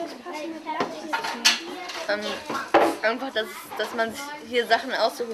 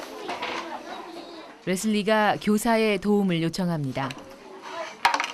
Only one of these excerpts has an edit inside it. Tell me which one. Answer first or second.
second